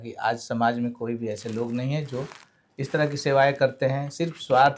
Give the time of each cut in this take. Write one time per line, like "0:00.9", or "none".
none